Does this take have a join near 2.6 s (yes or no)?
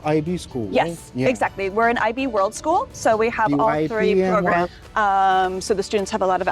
no